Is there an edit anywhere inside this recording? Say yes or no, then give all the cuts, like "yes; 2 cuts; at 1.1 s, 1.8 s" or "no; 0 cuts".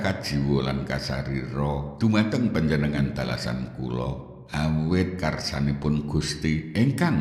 no; 0 cuts